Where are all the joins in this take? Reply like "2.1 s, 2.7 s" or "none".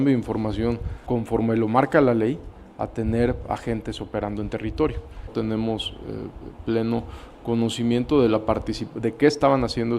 0.9 s, 5.3 s